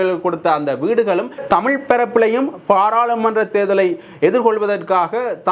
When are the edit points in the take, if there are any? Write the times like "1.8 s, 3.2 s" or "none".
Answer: 1.4 s